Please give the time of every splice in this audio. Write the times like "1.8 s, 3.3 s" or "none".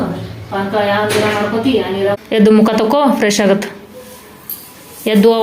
2.2 s